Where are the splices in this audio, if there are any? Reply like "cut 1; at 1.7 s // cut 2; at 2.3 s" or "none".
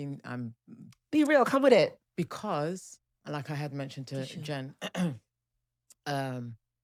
none